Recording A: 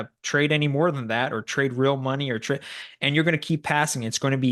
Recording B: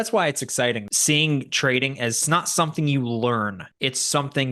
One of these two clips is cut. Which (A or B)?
B